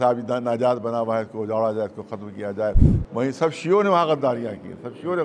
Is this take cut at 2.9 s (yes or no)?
yes